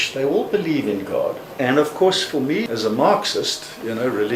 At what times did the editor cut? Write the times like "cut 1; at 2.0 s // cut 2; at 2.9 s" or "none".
cut 1; at 1.4 s // cut 2; at 2.6 s